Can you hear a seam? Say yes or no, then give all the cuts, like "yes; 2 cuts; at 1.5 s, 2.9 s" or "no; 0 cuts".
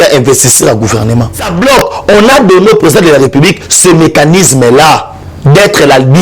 yes; 1 cut; at 1.5 s